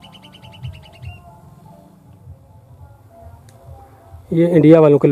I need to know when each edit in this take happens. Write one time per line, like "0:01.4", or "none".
0:02.5